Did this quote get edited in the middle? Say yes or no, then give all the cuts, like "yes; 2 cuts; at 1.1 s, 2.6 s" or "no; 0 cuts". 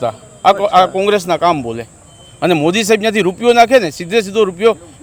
no; 0 cuts